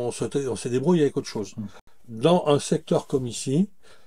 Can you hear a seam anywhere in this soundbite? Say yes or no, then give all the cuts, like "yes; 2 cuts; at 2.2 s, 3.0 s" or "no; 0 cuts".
no; 0 cuts